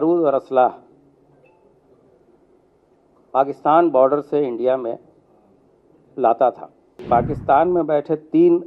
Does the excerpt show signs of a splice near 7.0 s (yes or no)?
yes